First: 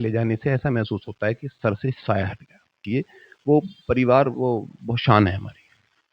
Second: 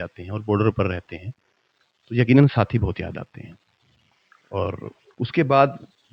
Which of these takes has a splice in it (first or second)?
first